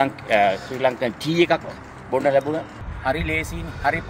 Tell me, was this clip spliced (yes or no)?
yes